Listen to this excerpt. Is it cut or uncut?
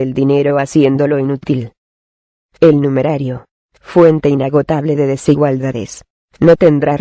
uncut